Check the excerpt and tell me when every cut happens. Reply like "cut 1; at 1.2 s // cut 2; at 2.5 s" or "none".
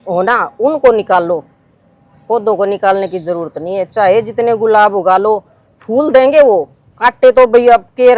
none